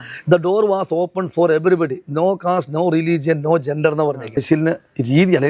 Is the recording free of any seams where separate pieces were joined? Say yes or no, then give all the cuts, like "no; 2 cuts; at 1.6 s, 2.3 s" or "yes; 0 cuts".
no; 1 cut; at 4.4 s